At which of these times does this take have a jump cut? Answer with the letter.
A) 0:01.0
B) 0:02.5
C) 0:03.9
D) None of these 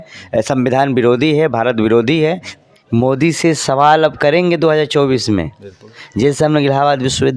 B